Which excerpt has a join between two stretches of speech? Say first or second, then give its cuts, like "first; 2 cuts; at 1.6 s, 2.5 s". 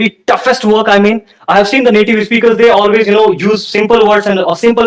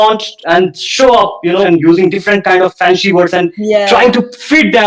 second; 1 cut; at 1.7 s